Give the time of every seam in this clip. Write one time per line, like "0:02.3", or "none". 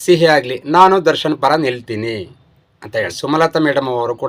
0:03.2